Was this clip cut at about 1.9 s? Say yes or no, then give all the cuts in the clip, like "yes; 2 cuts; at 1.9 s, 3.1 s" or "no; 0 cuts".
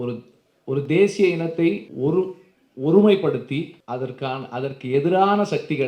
yes; 2 cuts; at 1.9 s, 3.8 s